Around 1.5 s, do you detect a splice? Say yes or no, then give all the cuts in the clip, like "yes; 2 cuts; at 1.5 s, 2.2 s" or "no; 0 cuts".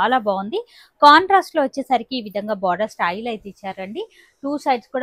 no; 0 cuts